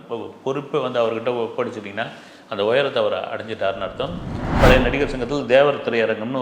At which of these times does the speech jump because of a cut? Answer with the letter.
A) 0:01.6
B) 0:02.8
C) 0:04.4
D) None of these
C